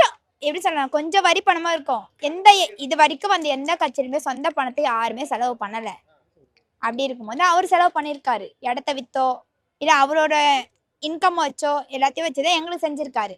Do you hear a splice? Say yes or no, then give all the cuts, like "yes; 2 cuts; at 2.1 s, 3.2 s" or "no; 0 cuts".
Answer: no; 0 cuts